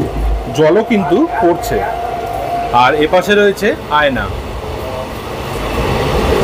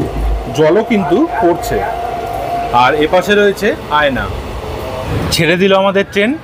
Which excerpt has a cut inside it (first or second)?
second